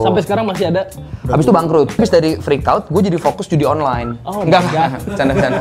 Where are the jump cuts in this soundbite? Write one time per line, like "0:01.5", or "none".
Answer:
0:02.0